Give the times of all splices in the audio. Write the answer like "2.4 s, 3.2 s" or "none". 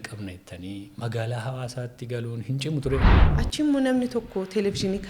3.0 s